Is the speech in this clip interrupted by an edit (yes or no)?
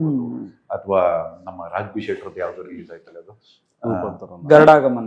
no